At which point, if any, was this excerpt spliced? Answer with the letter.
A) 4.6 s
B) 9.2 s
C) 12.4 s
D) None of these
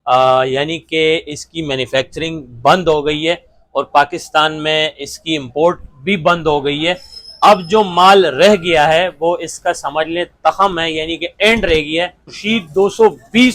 C